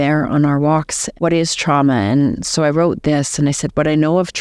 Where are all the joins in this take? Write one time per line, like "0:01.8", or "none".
0:01.0